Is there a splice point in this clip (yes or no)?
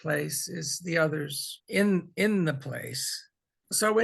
yes